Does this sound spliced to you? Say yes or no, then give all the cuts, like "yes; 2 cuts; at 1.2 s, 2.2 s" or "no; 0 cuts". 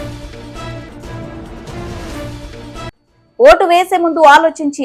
yes; 2 cuts; at 1.0 s, 2.8 s